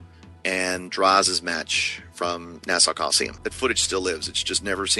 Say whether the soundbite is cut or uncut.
cut